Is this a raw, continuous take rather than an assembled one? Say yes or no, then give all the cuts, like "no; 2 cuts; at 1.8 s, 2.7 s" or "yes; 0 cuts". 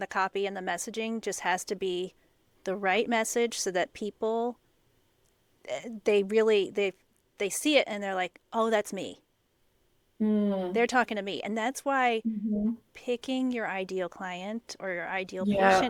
yes; 0 cuts